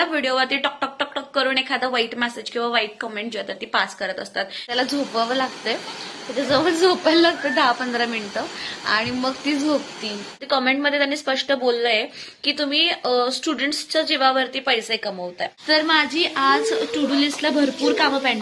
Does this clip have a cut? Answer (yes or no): yes